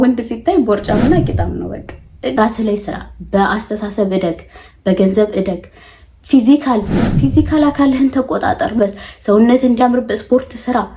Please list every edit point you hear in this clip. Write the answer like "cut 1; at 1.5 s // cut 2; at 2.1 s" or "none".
cut 1; at 2.4 s // cut 2; at 8.8 s